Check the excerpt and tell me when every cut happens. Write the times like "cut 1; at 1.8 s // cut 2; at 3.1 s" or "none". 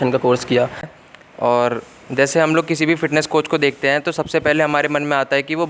cut 1; at 0.9 s

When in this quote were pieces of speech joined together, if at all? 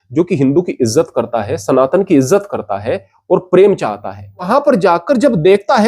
cut 1; at 4.5 s

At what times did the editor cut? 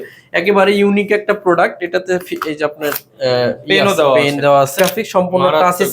cut 1; at 4.7 s

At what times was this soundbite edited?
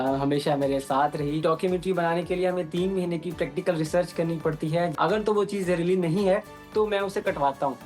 cut 1; at 1.4 s // cut 2; at 5.0 s

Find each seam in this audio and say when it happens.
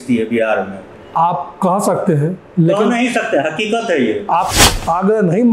cut 1; at 4.5 s

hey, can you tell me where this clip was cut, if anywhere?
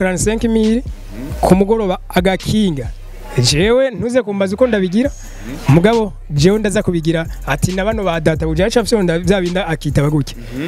none

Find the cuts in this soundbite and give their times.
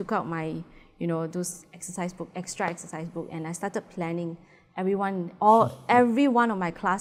none

